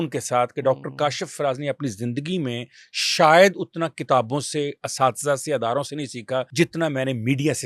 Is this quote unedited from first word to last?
no; 1 cut; at 6.5 s

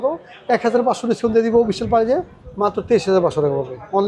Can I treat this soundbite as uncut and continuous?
yes; 0 cuts

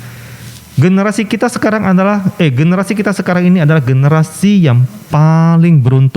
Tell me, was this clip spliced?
no; 0 cuts

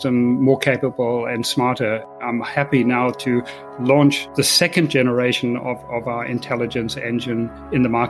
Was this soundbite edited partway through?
yes; 1 cut; at 2.1 s

